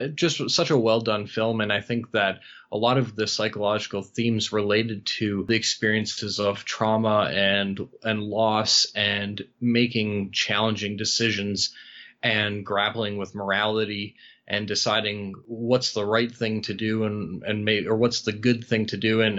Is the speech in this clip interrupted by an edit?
yes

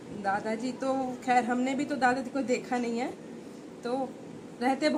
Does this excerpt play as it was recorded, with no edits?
yes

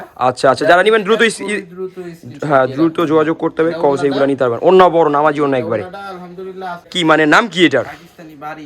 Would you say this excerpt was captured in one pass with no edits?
no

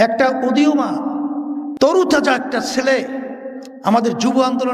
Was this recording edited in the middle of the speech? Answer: no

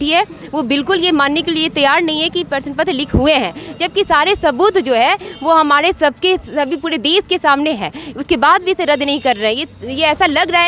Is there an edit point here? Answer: no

